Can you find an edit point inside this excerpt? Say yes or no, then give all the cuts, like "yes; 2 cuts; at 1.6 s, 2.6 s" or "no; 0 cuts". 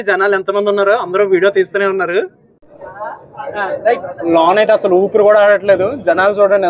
yes; 1 cut; at 2.8 s